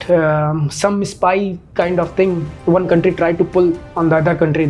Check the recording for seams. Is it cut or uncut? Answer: cut